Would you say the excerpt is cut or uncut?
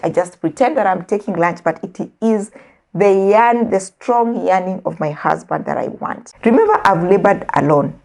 cut